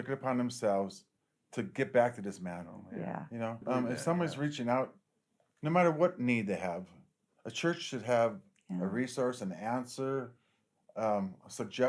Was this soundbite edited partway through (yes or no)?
yes